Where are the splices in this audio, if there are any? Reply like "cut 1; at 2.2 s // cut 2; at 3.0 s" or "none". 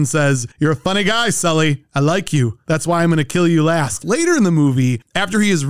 cut 1; at 4.0 s